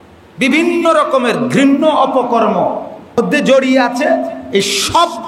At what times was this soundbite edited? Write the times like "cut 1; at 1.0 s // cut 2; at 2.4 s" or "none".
cut 1; at 3.2 s

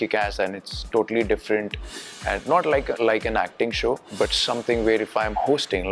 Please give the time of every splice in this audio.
cut 1; at 3.0 s // cut 2; at 4.1 s

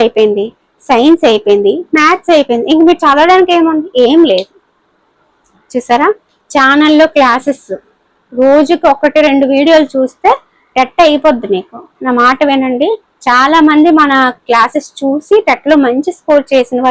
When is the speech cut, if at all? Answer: none

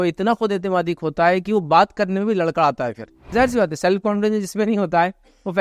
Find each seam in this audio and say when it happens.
cut 1; at 3.2 s

